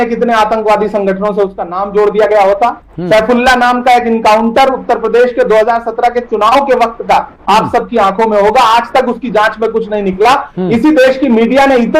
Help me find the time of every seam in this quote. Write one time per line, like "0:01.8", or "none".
none

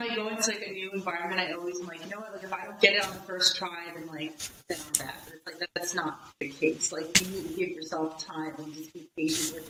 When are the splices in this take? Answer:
none

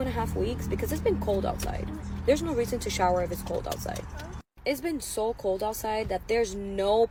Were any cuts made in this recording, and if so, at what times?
none

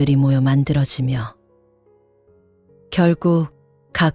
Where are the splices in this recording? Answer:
none

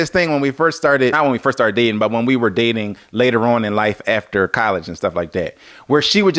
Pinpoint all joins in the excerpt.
0:01.2

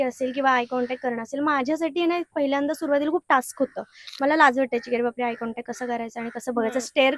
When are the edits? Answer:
none

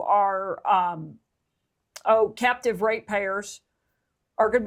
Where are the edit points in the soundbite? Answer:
none

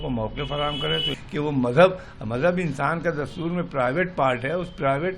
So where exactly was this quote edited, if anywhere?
0:01.2

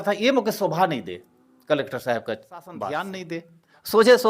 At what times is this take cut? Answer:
0:02.8

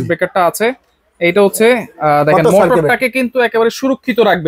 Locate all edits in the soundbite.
none

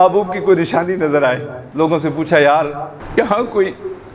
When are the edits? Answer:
0:01.6
0:02.9

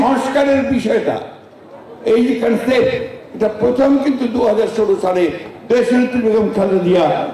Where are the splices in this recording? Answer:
none

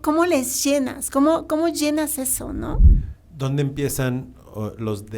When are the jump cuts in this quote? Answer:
0:02.9

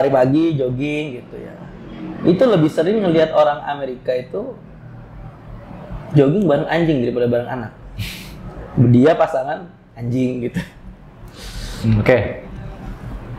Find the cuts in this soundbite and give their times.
none

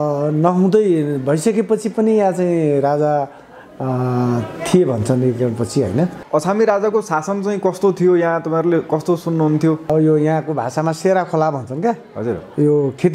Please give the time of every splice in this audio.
0:06.2
0:09.8

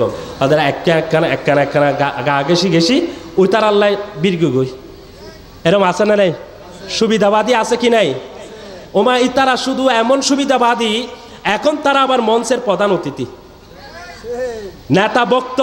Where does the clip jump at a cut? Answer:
none

